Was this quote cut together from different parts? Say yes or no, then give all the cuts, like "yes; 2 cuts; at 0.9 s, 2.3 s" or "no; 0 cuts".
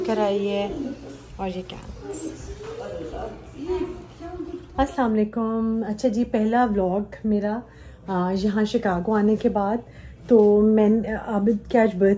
no; 0 cuts